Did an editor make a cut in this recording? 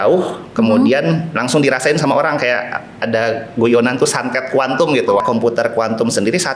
yes; 1 cut; at 5.2 s

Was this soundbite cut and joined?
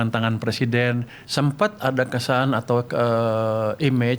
yes; 1 cut; at 1.1 s

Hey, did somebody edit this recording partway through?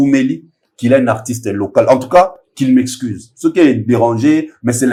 no; 0 cuts

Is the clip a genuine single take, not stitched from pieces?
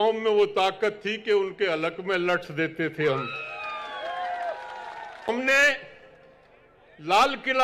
no; 1 cut; at 5.3 s

